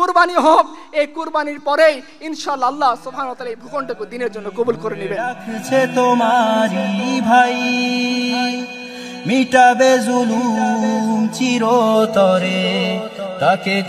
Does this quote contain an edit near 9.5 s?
no; 1 cut; at 5.2 s

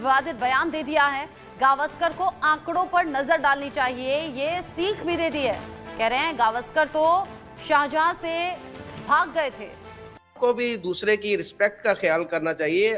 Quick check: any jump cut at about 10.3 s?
yes; 1 cut; at 10.3 s

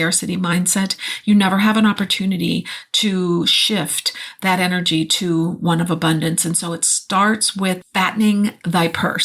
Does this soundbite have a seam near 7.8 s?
yes; 1 cut; at 7.8 s

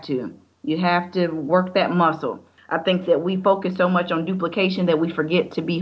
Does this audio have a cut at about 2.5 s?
yes; 1 cut; at 2.5 s

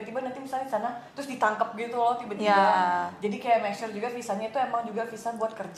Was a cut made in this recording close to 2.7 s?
no; 0 cuts

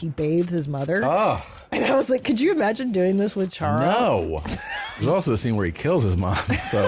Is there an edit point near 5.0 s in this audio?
yes; 1 cut; at 5.0 s

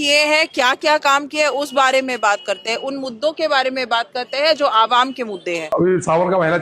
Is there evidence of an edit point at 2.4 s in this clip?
no; 1 cut; at 5.6 s

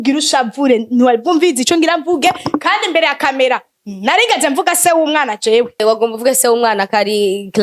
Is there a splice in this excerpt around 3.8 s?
no; 1 cut; at 5.7 s

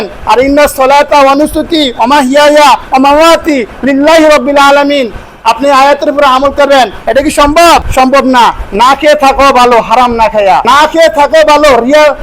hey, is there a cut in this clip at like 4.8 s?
no; 2 cuts; at 7.9 s, 10.6 s

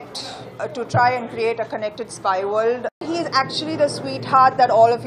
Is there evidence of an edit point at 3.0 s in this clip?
yes; 1 cut; at 3.0 s

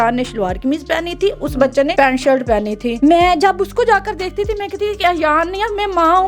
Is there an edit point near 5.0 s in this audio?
no; 2 cuts; at 1.9 s, 2.9 s

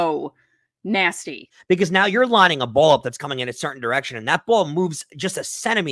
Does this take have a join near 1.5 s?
yes; 1 cut; at 1.5 s

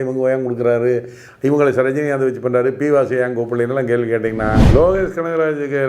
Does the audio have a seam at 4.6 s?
yes; 1 cut; at 4.6 s

